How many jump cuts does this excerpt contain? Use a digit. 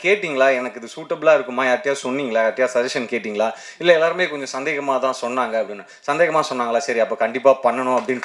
0